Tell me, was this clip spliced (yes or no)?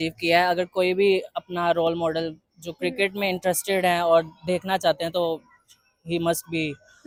no